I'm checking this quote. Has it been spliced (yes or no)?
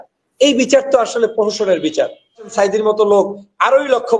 yes